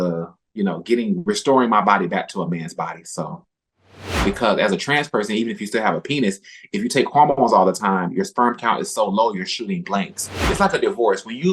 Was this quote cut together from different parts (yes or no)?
yes